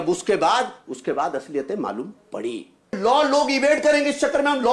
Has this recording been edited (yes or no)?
yes